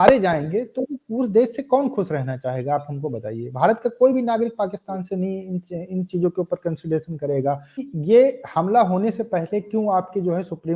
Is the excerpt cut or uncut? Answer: cut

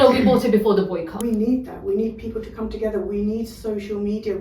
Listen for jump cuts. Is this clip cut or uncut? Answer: cut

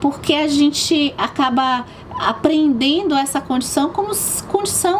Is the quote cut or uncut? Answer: uncut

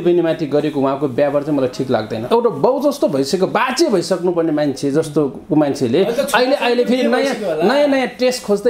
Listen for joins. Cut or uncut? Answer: cut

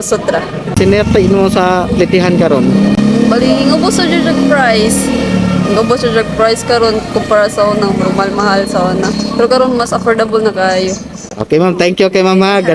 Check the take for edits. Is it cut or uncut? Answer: uncut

